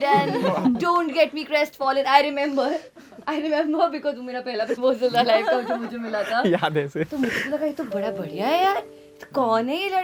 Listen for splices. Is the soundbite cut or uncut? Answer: uncut